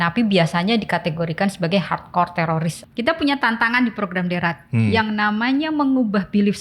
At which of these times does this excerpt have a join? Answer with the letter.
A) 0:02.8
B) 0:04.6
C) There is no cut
A